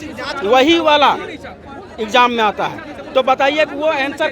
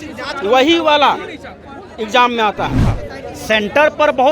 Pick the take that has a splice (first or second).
second